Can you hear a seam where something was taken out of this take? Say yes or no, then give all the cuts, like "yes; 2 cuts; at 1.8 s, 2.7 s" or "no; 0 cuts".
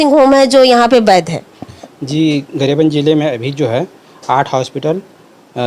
no; 0 cuts